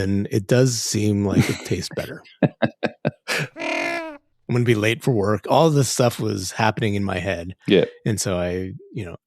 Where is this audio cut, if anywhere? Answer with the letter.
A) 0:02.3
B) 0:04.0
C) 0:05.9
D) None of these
B